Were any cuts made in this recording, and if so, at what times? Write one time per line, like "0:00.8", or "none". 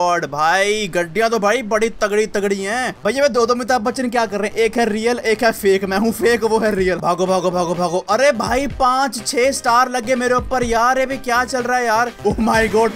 0:02.9
0:07.0
0:12.1